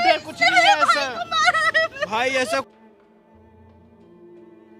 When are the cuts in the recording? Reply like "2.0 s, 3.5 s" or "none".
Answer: 2.7 s